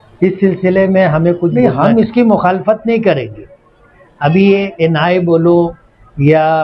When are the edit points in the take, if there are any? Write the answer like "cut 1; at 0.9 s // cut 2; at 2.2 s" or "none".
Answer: cut 1; at 1.6 s